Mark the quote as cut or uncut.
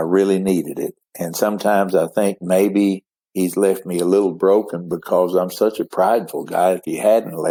uncut